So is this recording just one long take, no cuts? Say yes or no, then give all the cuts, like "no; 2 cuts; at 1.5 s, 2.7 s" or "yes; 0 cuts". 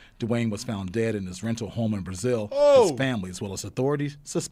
yes; 0 cuts